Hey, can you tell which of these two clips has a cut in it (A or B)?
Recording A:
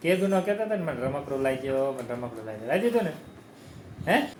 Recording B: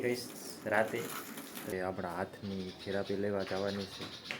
B